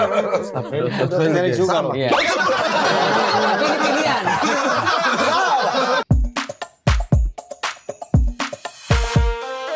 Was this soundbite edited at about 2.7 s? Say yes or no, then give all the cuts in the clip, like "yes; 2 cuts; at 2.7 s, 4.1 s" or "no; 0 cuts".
no; 1 cut; at 6.0 s